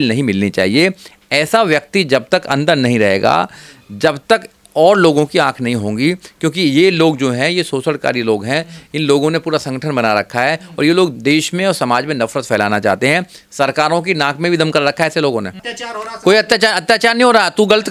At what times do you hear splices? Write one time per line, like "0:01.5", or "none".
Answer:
none